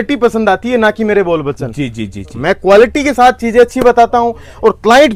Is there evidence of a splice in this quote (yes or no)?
no